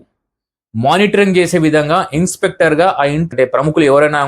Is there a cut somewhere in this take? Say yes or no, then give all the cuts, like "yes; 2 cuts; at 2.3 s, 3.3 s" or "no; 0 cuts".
yes; 1 cut; at 3.3 s